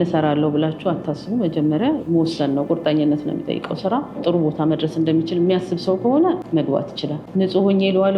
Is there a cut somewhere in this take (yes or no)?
yes